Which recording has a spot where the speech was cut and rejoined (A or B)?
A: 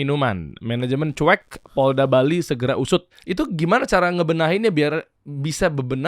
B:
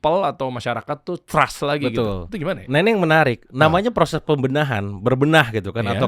A